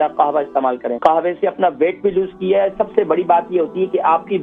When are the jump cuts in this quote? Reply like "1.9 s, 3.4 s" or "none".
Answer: 0.9 s